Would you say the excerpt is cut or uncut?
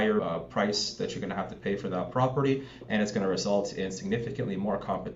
uncut